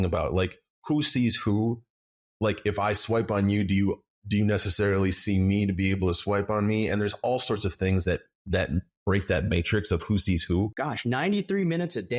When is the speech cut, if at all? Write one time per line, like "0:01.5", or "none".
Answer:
0:10.7